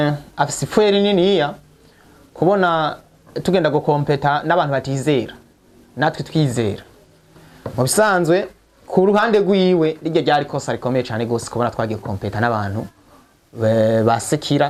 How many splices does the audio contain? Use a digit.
0